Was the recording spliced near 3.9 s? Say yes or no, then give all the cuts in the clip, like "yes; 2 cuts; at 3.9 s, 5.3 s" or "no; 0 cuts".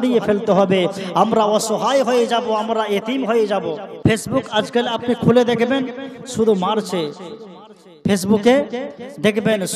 yes; 1 cut; at 3.9 s